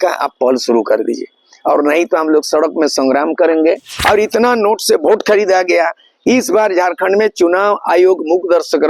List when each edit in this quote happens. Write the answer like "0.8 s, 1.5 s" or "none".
3.9 s